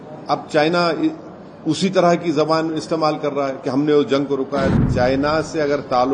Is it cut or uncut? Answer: cut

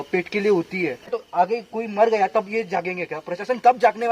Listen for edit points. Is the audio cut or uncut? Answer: cut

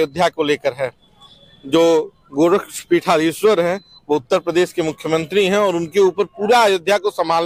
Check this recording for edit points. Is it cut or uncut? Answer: uncut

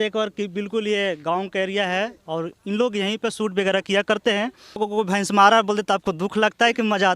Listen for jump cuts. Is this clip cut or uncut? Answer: cut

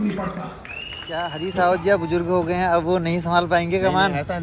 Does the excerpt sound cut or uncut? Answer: cut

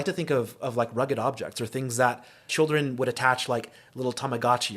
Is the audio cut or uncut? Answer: cut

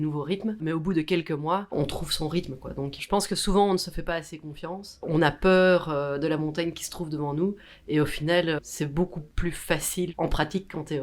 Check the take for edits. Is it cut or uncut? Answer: cut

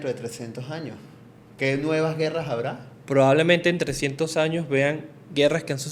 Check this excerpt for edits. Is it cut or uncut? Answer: uncut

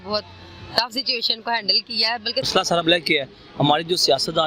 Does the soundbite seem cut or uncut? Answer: cut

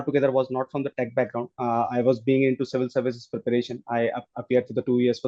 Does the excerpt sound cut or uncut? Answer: uncut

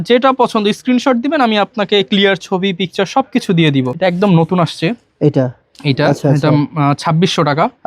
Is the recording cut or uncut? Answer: cut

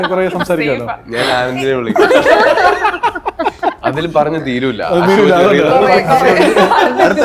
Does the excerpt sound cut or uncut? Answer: uncut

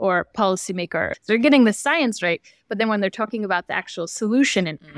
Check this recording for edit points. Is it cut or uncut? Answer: cut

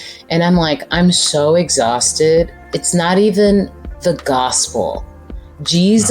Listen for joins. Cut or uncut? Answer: cut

